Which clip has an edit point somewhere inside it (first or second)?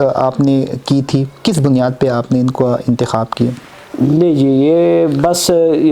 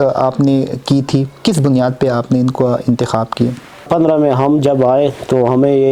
second